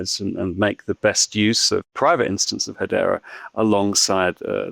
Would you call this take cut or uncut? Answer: cut